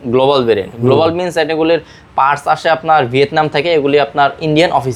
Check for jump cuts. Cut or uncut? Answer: uncut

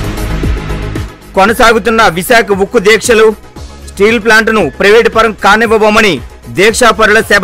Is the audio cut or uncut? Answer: uncut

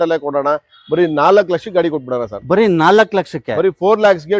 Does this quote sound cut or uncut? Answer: uncut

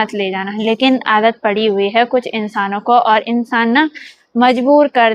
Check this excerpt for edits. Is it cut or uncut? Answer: uncut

